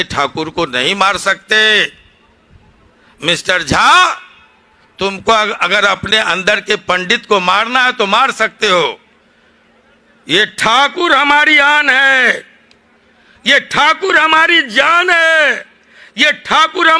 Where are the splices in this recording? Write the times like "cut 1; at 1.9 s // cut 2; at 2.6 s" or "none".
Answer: none